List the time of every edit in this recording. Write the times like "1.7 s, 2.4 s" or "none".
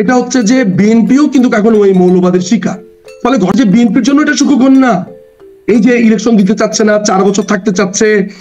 3.5 s